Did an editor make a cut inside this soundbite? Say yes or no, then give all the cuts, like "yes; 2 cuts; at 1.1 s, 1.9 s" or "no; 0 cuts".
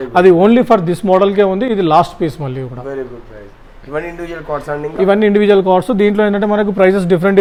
no; 0 cuts